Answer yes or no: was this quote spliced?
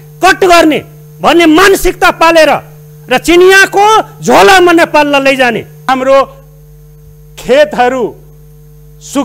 yes